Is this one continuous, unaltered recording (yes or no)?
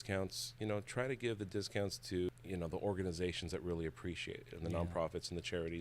no